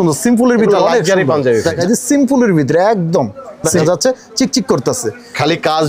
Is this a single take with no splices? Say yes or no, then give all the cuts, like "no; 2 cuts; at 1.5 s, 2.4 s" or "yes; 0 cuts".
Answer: no; 2 cuts; at 1.7 s, 3.8 s